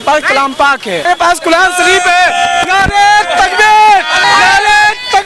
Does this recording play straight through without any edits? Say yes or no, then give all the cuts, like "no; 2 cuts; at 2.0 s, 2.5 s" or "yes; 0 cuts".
no; 2 cuts; at 1.0 s, 4.2 s